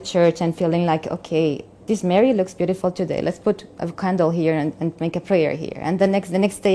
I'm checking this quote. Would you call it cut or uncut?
cut